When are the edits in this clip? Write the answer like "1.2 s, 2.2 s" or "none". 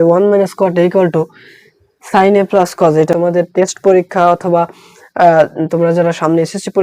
3.1 s